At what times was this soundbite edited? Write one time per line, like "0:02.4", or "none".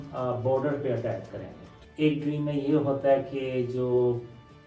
0:01.8